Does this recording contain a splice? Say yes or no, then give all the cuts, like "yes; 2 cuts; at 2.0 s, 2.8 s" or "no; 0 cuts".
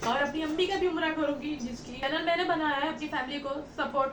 yes; 1 cut; at 1.9 s